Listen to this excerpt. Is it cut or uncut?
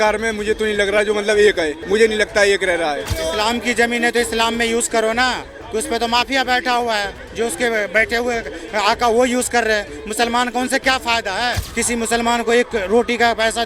cut